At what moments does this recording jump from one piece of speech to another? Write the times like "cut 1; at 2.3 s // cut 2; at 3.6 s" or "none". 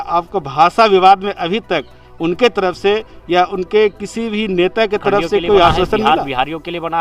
cut 1; at 6.0 s